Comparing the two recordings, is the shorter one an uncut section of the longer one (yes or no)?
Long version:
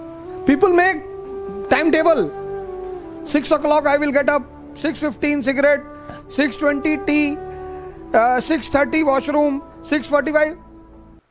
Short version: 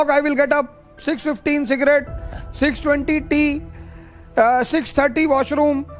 yes